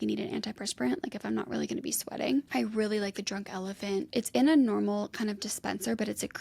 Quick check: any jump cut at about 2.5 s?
yes; 2 cuts; at 2.5 s, 4.1 s

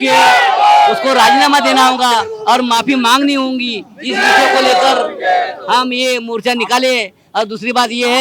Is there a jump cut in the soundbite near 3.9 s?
no; 0 cuts

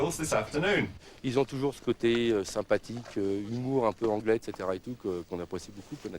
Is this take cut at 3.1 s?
no; 1 cut; at 1.1 s

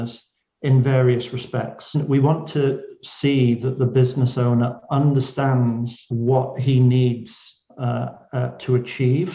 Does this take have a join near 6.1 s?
yes; 2 cuts; at 1.9 s, 6.1 s

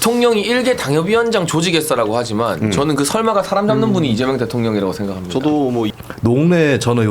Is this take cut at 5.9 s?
yes; 1 cut; at 5.9 s

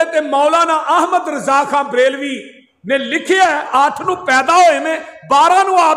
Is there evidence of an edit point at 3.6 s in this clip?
yes; 1 cut; at 3.6 s

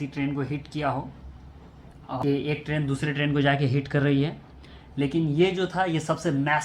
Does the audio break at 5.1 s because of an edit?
no; 1 cut; at 2.2 s

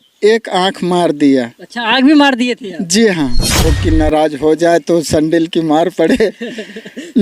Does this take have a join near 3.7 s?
yes; 1 cut; at 3.7 s

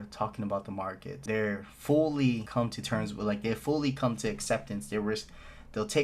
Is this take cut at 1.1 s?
yes; 2 cuts; at 1.1 s, 2.5 s

